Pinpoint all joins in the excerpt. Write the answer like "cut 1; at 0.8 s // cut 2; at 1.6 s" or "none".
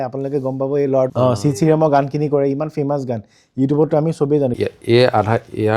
cut 1; at 1.1 s // cut 2; at 4.5 s